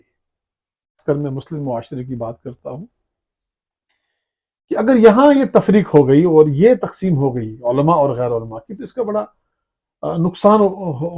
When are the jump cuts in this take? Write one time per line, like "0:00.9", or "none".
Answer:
0:01.0